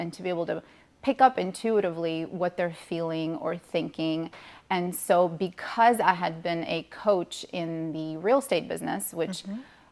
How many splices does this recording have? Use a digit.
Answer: 0